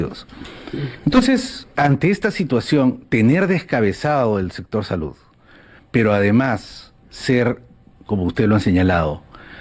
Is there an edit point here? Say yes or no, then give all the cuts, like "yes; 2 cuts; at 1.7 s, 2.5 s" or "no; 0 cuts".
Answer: yes; 1 cut; at 1.7 s